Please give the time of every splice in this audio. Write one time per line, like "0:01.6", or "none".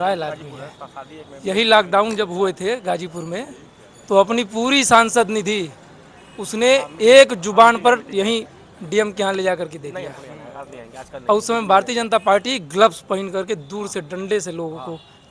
none